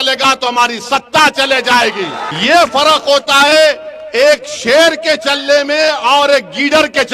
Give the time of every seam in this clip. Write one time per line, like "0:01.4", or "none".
0:02.2

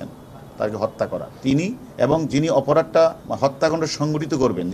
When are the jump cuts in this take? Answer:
0:01.8
0:03.2

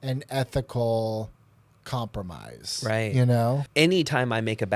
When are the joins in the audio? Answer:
0:03.7

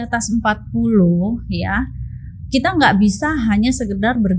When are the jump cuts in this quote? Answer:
none

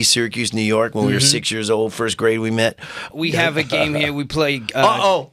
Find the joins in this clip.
0:03.0

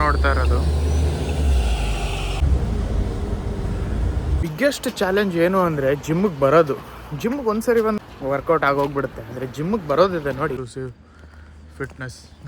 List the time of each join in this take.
0:04.4
0:08.0
0:10.7

